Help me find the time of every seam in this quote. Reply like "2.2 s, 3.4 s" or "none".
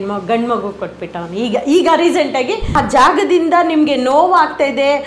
2.7 s